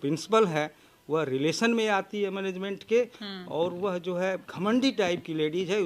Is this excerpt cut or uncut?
cut